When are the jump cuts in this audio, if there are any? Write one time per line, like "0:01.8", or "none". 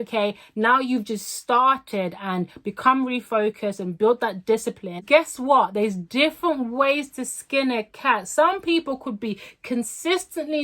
0:05.0